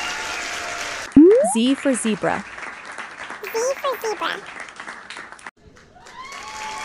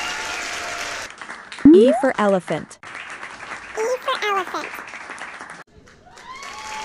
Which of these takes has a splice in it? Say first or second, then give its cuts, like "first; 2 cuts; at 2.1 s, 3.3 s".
second; 2 cuts; at 1.1 s, 5.6 s